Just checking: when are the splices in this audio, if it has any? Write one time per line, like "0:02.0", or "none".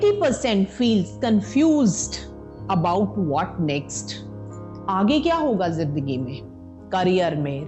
none